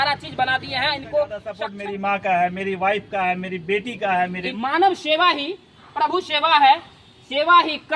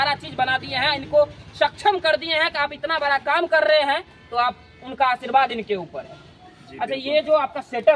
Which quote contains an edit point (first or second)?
first